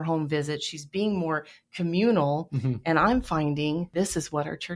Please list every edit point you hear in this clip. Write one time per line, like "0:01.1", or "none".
0:03.9